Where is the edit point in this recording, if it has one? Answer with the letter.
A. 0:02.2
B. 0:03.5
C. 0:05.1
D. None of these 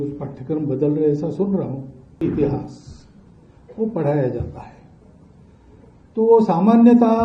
A